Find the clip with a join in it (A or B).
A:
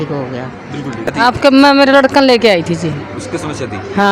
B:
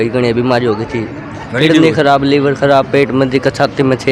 A